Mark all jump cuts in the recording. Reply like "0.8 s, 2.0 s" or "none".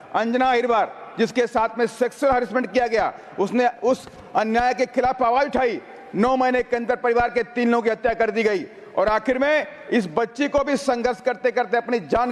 none